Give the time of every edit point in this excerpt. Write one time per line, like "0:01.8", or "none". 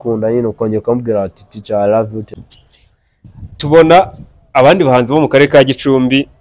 0:02.3